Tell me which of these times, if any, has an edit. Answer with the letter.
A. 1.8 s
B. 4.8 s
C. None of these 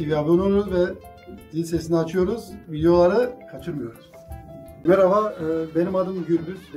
B